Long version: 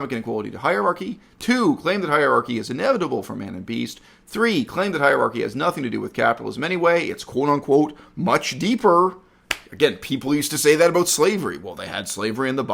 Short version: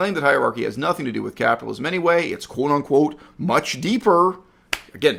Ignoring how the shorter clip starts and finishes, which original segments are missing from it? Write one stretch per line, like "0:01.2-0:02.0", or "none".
none

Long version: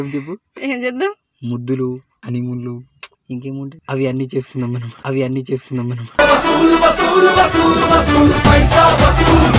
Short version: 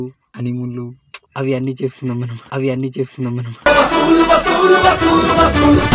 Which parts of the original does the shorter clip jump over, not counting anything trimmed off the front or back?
0:03.1-0:03.8

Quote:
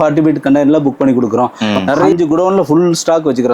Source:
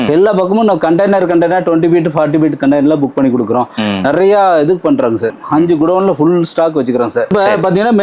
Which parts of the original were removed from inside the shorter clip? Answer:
0:04.2-0:05.5

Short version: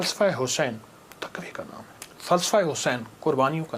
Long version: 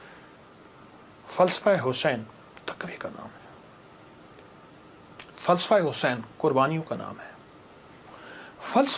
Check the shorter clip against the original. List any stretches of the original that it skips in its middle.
0:03.5-0:05.2

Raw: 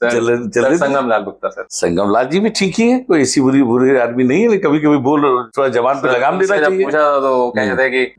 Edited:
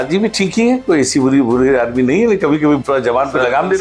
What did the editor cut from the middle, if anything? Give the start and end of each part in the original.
0:05.0-0:05.5

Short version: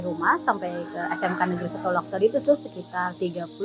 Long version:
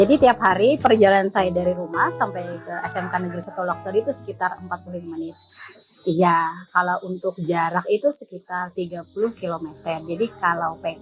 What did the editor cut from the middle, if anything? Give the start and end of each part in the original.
0:04.2-0:08.0

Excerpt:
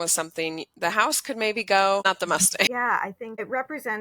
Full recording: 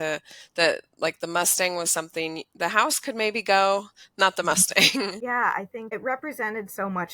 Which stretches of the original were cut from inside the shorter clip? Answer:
0:04.1-0:04.9

